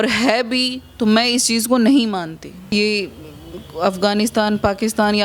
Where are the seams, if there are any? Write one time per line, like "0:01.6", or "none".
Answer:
0:02.7